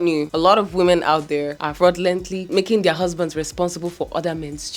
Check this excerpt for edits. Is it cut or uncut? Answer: cut